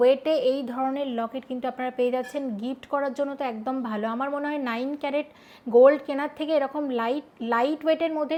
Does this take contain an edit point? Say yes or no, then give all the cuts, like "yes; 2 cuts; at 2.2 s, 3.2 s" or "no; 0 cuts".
no; 0 cuts